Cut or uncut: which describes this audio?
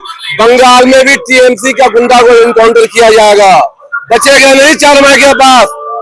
uncut